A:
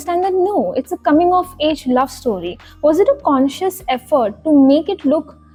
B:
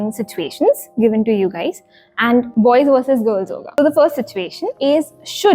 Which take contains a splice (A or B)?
B